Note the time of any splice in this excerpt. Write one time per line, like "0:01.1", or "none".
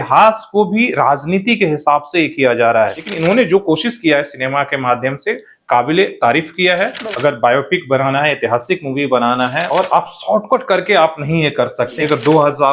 0:03.1
0:07.1
0:09.7
0:11.9